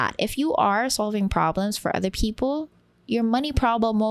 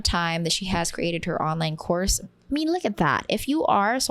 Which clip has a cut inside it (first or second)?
second